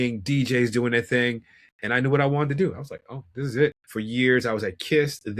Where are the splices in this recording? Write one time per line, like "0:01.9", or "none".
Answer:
0:03.8